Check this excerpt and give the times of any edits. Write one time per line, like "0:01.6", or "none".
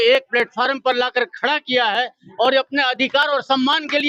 none